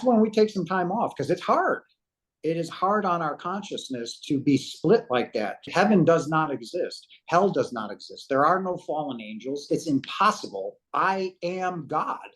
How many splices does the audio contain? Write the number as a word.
two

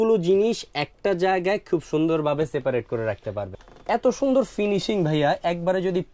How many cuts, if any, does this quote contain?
one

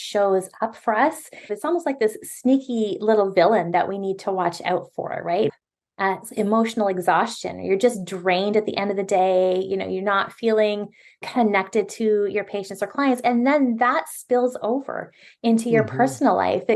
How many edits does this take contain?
two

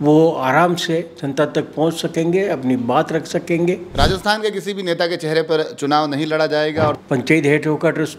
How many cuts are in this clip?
two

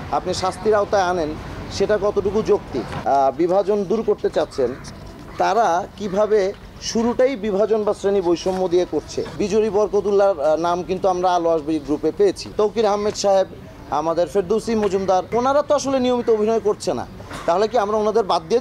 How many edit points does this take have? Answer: four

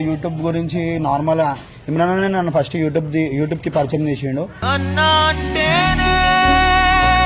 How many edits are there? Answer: zero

